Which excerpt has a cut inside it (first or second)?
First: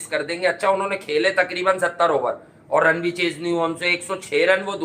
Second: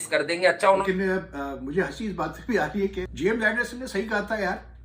second